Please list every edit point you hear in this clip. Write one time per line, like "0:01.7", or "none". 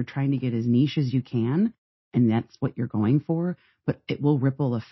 none

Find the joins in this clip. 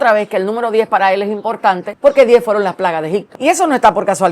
0:01.9
0:03.3

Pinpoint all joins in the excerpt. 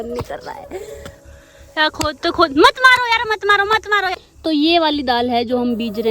0:01.2
0:04.2

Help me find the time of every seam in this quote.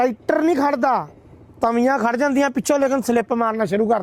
none

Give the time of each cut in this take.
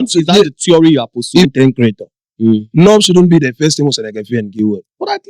0:01.4

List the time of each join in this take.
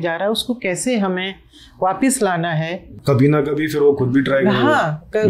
0:02.9

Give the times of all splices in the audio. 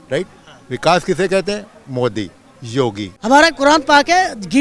0:03.1

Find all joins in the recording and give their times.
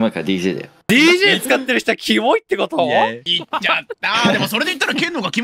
0:00.9
0:03.3

